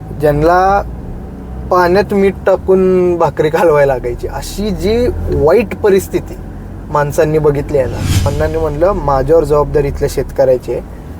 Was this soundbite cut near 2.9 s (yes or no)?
no